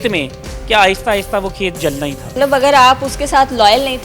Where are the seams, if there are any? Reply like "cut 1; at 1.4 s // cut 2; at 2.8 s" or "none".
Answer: cut 1; at 2.3 s